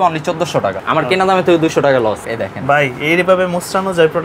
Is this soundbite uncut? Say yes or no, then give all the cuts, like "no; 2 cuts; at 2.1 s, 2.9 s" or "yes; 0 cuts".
no; 2 cuts; at 0.8 s, 2.2 s